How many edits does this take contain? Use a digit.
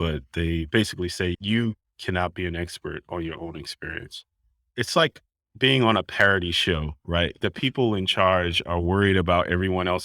3